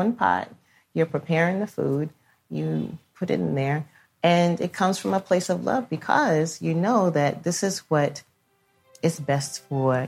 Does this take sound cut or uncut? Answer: cut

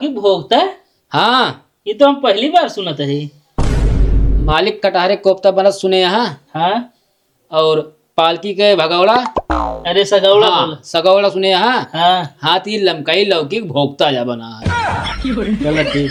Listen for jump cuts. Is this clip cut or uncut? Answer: uncut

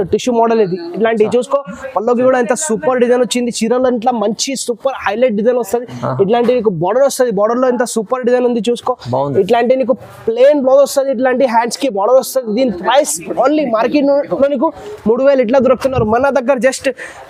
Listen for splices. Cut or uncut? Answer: uncut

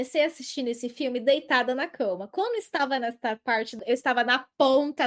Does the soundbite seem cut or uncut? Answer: cut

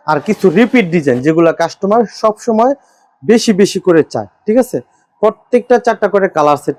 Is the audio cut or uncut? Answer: uncut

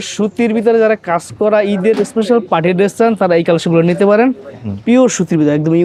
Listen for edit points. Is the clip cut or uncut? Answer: uncut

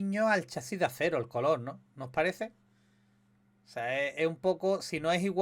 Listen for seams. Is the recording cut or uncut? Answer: uncut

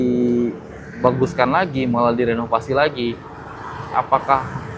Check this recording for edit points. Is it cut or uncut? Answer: uncut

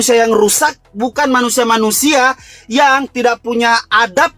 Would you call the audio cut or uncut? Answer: uncut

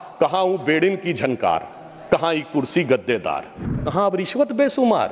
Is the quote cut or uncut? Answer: cut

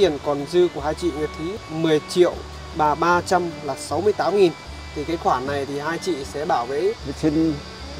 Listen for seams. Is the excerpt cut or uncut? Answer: cut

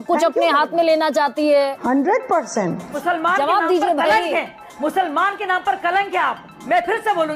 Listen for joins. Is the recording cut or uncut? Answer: cut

